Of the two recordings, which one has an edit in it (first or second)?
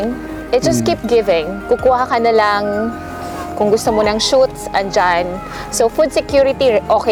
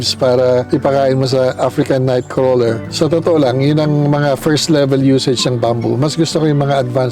second